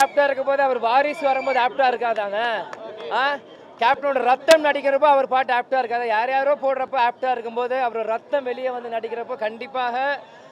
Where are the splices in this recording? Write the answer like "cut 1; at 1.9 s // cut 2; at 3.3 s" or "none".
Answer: none